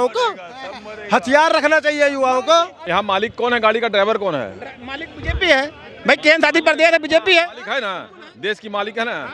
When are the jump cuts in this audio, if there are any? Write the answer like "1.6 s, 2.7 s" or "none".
2.8 s